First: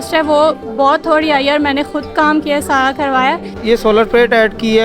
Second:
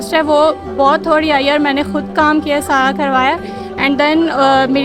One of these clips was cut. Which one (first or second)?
first